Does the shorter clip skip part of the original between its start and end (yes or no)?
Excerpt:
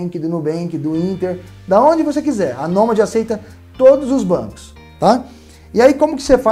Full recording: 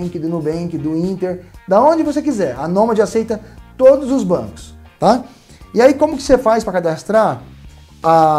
no